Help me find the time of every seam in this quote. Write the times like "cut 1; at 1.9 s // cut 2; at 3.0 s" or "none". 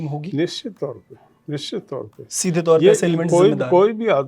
none